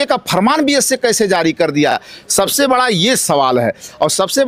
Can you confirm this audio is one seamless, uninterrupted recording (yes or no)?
yes